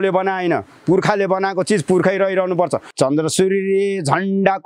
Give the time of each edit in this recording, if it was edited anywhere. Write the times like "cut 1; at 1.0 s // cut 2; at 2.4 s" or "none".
cut 1; at 2.8 s